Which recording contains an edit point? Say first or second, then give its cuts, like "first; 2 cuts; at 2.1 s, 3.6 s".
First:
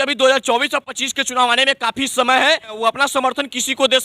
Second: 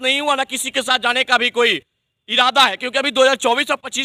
first; 1 cut; at 2.8 s